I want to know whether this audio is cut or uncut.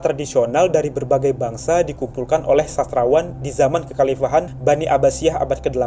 cut